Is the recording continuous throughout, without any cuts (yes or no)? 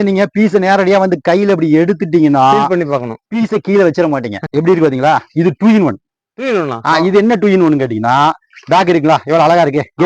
no